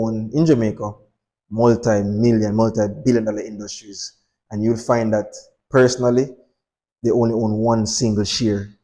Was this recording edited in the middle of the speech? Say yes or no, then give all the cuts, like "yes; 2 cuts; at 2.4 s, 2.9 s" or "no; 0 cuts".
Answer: no; 0 cuts